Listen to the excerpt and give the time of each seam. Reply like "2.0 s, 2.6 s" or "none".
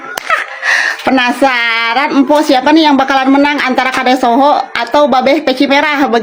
none